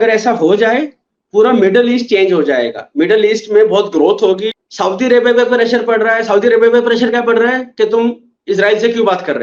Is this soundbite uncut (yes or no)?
no